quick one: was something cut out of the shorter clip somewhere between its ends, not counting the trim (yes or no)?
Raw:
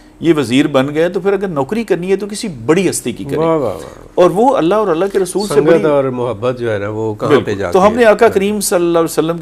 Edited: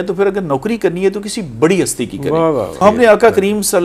yes